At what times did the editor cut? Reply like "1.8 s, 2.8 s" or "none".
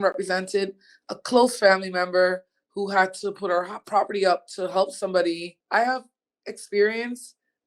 5.5 s